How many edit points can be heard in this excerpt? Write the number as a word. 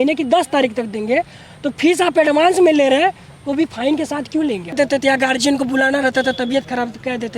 one